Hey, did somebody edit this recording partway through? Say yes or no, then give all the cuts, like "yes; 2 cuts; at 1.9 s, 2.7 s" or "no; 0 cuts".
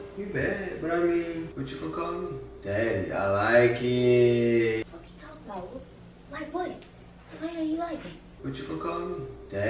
yes; 3 cuts; at 1.5 s, 4.8 s, 8.2 s